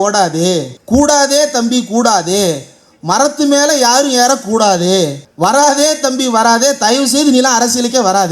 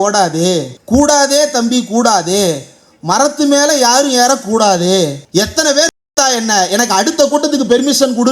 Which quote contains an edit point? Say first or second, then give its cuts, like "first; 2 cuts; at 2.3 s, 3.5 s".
second; 1 cut; at 5.2 s